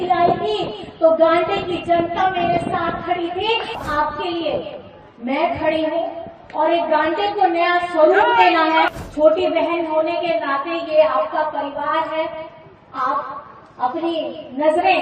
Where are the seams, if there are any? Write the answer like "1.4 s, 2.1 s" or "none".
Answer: 3.7 s, 9.0 s